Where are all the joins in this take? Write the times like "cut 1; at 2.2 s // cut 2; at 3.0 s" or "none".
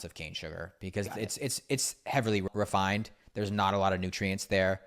cut 1; at 2.5 s